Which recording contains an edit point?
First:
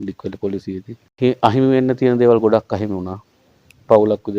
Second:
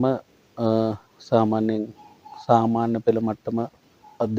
first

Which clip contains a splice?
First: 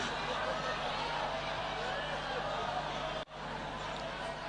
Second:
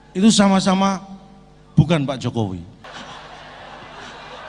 second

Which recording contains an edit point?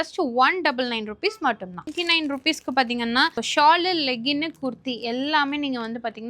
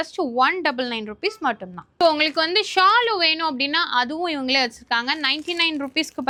first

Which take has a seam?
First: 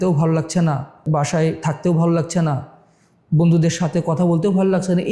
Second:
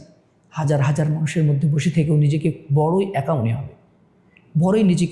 first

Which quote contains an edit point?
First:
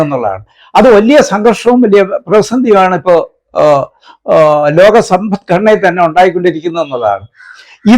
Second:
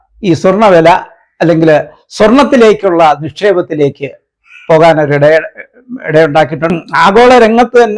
second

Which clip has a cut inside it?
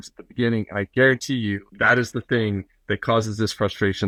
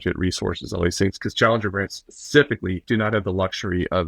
second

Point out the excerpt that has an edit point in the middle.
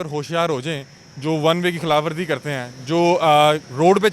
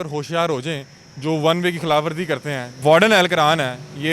second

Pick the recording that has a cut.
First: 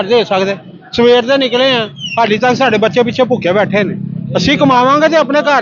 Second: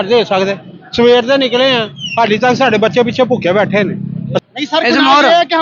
second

